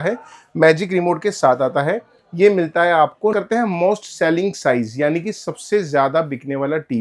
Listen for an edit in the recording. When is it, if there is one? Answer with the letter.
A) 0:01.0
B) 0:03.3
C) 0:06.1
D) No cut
B